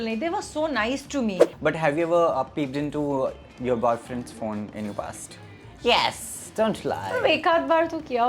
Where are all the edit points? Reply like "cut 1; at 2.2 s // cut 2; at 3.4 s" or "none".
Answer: cut 1; at 1.5 s